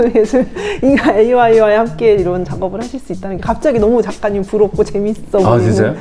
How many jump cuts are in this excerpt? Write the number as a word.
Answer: zero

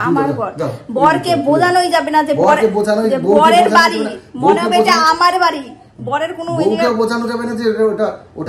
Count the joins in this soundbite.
zero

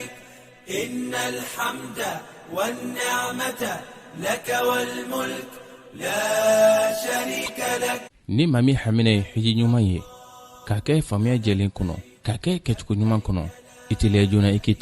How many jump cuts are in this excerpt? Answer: one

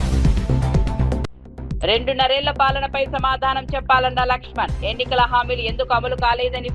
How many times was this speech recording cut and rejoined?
one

